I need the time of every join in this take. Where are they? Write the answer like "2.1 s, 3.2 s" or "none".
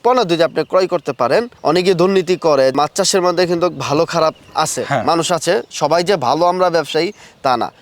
1.5 s, 2.7 s

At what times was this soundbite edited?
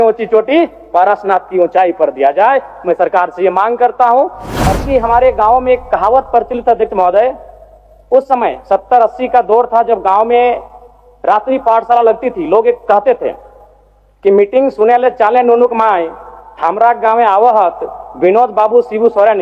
4.6 s

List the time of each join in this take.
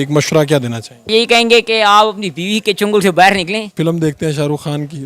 1.1 s, 3.7 s

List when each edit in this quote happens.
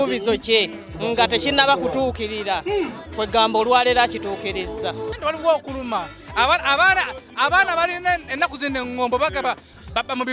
5.1 s

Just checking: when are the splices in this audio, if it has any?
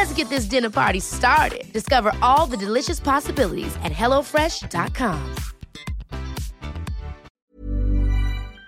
7.3 s

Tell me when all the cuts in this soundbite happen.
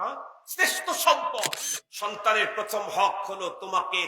1.6 s

